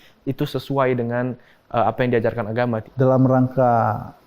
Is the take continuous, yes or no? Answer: no